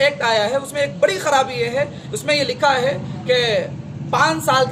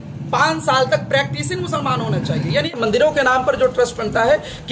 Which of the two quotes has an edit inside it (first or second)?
second